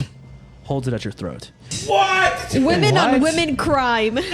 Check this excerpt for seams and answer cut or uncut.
cut